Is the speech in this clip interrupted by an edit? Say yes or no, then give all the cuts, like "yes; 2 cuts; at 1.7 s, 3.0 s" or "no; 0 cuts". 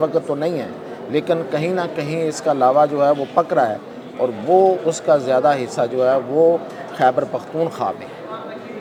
no; 0 cuts